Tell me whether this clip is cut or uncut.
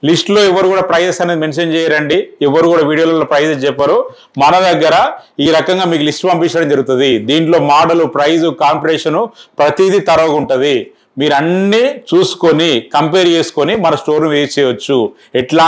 uncut